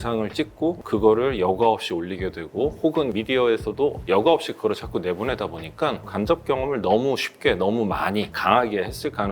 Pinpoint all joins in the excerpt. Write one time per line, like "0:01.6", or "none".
0:03.1
0:06.0